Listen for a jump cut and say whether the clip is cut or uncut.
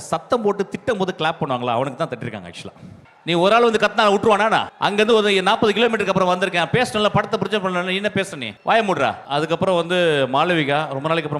cut